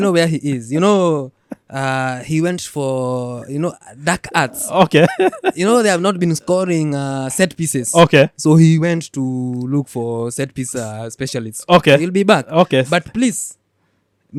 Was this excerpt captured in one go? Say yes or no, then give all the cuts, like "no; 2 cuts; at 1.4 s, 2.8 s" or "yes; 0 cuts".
yes; 0 cuts